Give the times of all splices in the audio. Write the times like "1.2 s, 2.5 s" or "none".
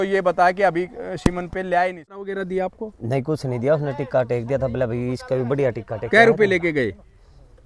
2.3 s